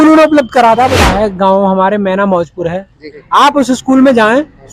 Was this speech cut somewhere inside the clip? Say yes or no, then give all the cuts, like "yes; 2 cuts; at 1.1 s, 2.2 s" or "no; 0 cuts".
yes; 2 cuts; at 1.0 s, 3.1 s